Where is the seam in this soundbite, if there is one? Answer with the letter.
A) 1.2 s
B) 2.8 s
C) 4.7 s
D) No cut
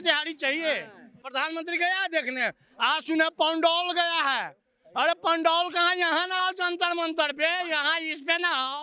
A